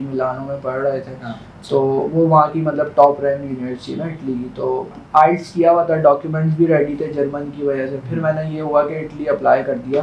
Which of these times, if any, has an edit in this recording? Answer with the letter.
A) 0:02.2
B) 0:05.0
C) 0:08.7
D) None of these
B